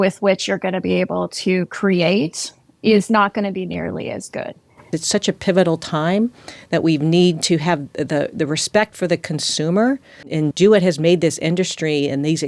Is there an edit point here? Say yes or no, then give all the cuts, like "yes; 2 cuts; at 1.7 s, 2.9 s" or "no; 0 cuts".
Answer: yes; 2 cuts; at 5.0 s, 10.3 s